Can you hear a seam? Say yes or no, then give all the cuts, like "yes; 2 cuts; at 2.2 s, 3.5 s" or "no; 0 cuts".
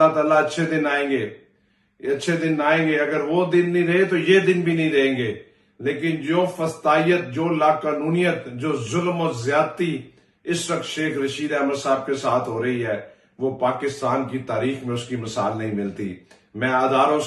no; 0 cuts